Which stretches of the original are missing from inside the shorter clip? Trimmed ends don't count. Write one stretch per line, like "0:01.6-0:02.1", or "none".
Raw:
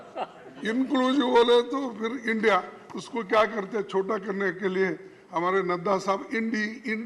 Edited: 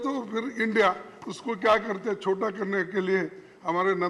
none